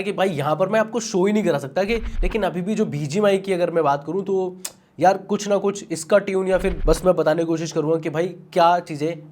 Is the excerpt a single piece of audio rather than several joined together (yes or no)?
no